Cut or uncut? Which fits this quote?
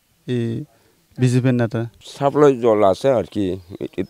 cut